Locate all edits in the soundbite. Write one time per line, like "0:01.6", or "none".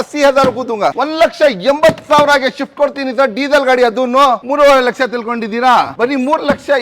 0:01.0
0:04.4
0:05.9